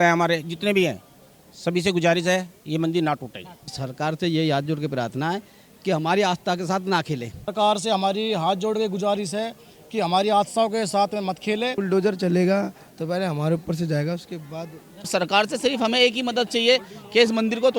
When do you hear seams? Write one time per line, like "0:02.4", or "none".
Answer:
0:03.8
0:07.5
0:11.8
0:15.1